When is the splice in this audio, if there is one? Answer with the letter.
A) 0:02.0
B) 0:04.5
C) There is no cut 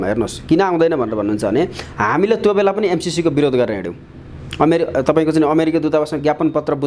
C